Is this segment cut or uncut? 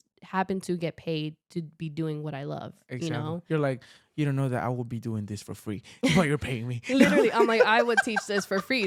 uncut